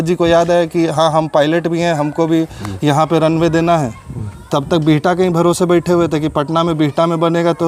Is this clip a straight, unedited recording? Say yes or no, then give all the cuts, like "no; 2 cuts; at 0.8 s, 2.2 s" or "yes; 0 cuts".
yes; 0 cuts